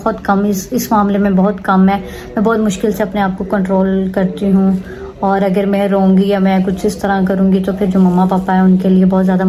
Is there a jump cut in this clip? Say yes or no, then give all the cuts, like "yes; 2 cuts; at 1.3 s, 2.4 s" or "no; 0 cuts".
no; 0 cuts